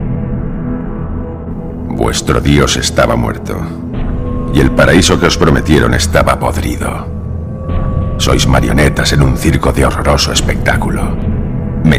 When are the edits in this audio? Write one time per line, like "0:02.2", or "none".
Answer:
0:01.0

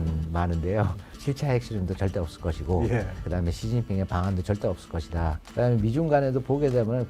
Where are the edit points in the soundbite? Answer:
0:01.3
0:03.4
0:05.4

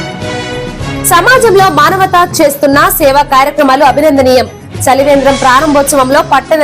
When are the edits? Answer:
none

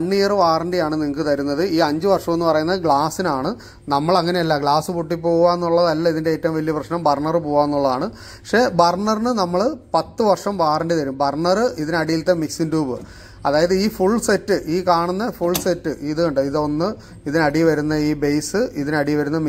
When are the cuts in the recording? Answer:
none

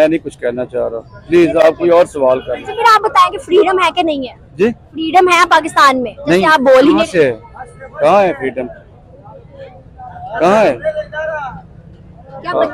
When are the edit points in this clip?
none

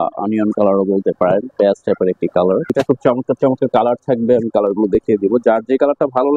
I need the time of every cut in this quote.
0:02.7

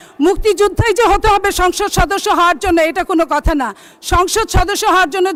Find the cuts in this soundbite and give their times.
none

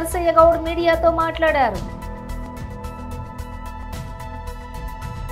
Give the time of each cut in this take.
0:02.4
0:03.8

